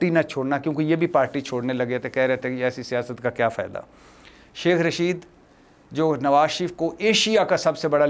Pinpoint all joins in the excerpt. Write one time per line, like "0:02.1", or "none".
none